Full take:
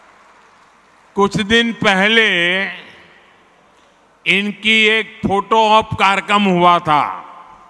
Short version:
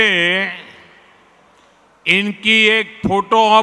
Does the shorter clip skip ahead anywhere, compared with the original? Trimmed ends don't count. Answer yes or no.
no